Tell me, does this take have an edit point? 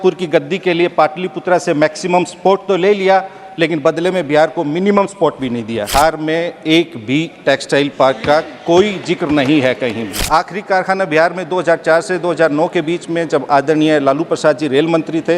yes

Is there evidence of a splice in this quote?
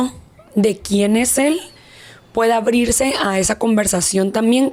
no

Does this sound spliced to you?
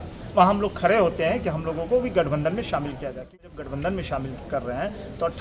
yes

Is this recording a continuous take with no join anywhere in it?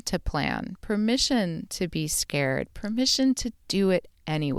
yes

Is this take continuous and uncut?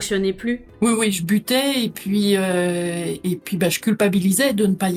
yes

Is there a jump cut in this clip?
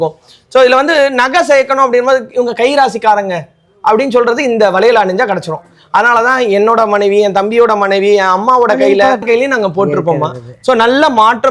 no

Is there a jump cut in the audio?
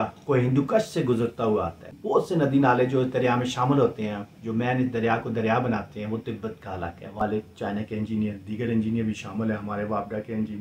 yes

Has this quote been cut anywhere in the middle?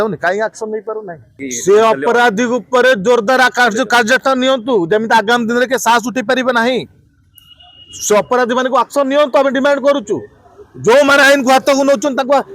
yes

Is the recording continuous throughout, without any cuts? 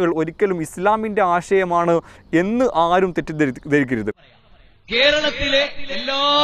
no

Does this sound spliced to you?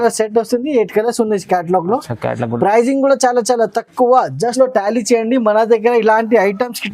yes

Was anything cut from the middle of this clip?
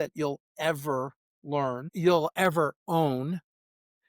yes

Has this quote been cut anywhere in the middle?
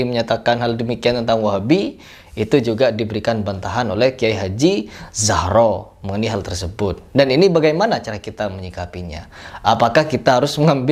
no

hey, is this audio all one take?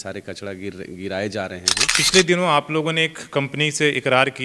no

